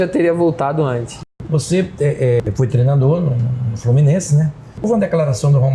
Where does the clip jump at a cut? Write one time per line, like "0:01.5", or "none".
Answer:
0:01.1
0:02.4
0:04.8